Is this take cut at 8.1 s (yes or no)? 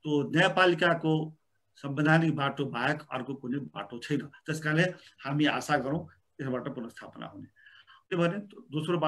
yes